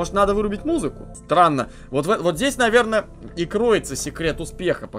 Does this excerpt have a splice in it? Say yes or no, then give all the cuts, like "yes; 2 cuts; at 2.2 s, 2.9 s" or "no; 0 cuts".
yes; 1 cut; at 1.1 s